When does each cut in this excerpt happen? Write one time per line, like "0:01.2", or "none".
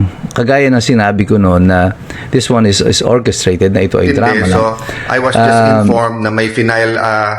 0:05.9